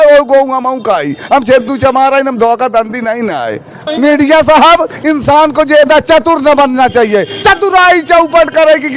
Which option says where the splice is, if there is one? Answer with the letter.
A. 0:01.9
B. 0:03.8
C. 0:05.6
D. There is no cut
B